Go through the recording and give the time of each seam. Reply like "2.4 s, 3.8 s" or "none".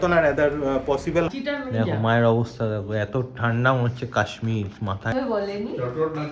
1.3 s, 5.1 s